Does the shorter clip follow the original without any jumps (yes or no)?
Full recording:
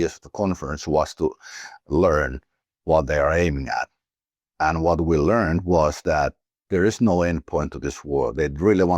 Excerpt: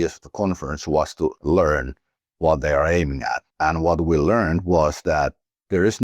no